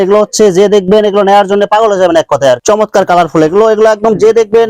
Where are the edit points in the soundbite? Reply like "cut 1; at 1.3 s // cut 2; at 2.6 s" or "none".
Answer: cut 1; at 2.6 s